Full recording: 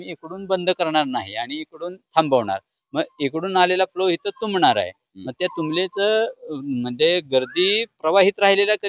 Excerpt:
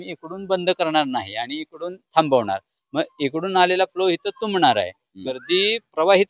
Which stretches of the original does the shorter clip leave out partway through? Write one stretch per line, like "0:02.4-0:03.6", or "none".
0:05.4-0:07.5